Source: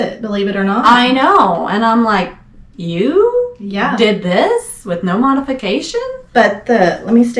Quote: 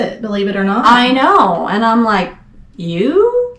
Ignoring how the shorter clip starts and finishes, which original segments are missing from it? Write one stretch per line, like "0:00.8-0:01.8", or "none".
none